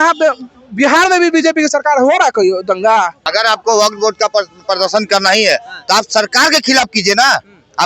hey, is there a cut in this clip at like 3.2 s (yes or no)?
yes